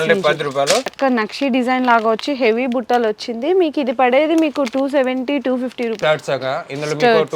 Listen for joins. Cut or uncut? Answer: cut